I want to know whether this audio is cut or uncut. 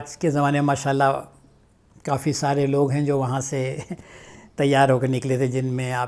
uncut